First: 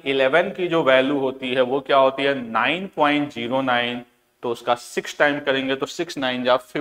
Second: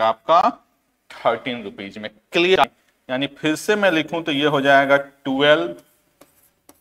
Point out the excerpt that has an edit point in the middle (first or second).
second